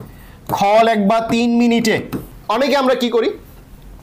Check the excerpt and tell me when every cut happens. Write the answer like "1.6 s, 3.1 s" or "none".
2.3 s

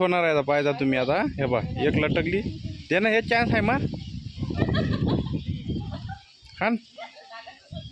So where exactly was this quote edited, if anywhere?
none

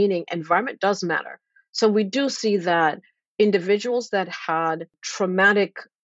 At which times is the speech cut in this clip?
5.0 s

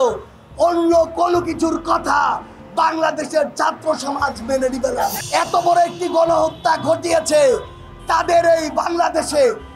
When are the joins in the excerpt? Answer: 5.2 s

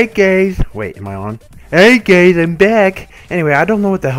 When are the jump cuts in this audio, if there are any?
2.9 s

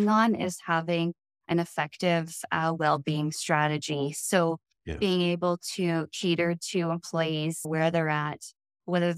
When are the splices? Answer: 7.7 s

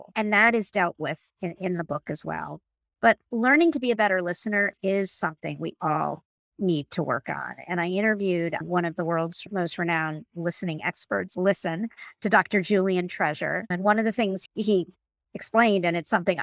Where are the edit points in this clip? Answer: 9.4 s, 11.3 s, 13.7 s, 14.5 s

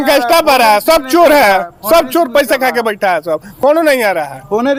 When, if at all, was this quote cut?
none

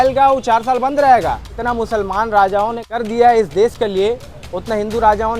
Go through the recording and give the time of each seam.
1.6 s, 2.8 s

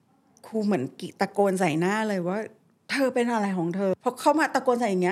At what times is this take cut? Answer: 3.9 s

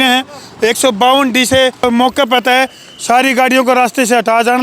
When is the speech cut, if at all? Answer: 1.8 s

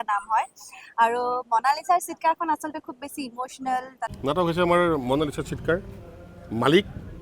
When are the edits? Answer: 4.1 s

